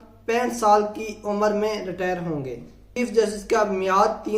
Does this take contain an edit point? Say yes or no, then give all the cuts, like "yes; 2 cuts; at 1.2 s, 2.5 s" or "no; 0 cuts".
yes; 1 cut; at 2.9 s